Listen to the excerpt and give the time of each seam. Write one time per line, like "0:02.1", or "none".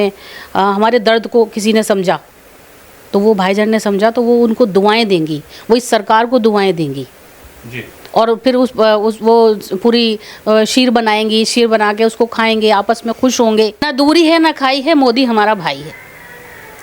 0:13.9